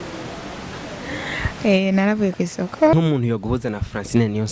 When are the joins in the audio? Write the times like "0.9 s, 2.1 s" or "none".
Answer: 2.9 s